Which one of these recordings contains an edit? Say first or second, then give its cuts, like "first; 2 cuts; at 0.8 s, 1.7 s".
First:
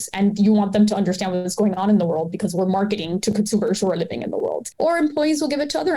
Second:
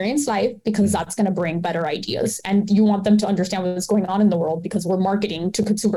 first; 1 cut; at 4.7 s